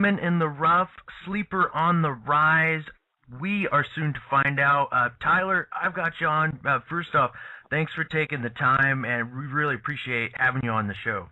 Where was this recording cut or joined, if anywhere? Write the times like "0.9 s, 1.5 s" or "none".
9.3 s